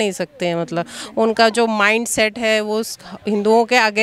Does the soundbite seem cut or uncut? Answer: uncut